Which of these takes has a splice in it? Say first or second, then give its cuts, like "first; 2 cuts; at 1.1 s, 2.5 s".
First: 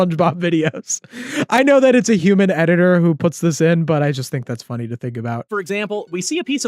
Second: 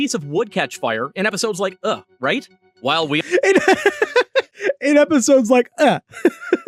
first; 1 cut; at 5.5 s